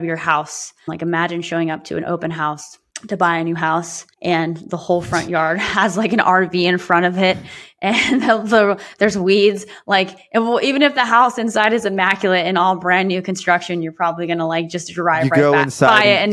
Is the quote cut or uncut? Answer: uncut